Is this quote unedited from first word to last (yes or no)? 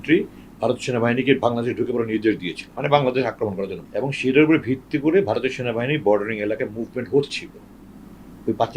no